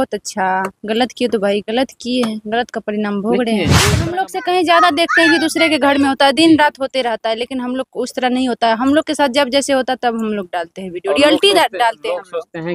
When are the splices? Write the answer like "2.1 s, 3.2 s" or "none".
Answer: 3.9 s

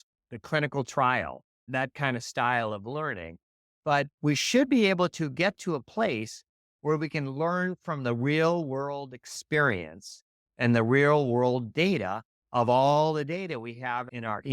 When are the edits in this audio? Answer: 1.7 s

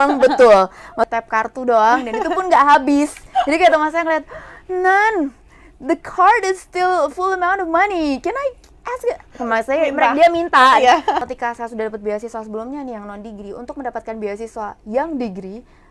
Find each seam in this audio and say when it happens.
1.1 s, 11.2 s

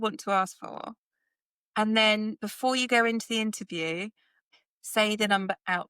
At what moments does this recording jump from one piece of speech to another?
4.3 s

